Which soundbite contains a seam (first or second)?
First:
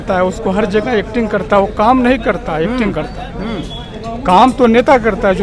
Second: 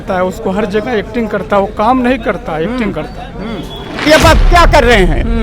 second